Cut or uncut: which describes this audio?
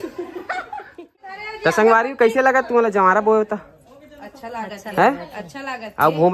cut